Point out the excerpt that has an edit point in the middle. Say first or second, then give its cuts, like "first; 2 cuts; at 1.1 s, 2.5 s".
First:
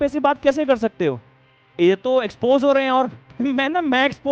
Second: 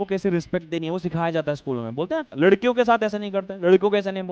second; 1 cut; at 2.3 s